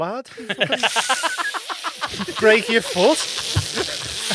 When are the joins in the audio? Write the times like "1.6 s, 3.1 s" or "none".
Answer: none